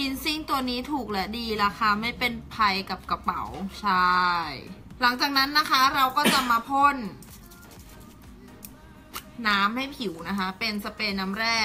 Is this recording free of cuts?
yes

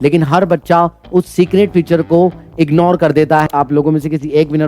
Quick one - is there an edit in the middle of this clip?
yes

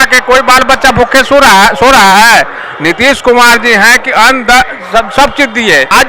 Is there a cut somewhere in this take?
no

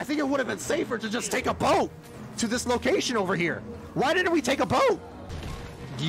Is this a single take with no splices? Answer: yes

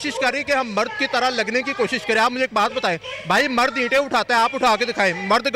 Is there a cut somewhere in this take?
no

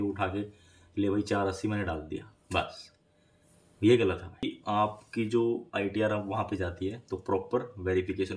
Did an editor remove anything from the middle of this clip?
yes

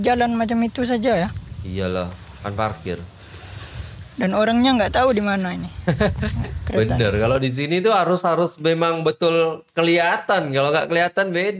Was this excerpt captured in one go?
yes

